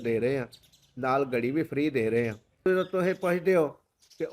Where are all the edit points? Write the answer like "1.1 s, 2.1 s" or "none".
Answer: 2.6 s